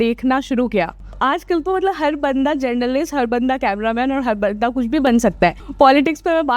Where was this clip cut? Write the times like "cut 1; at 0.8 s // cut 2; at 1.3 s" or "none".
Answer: cut 1; at 1.1 s // cut 2; at 5.6 s